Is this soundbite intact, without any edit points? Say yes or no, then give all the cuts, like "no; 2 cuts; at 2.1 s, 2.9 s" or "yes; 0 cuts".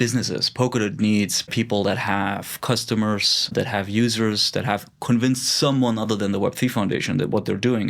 no; 2 cuts; at 1.5 s, 3.5 s